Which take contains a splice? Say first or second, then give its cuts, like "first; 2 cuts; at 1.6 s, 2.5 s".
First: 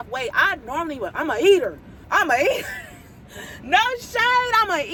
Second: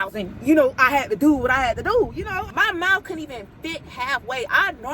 second; 1 cut; at 2.5 s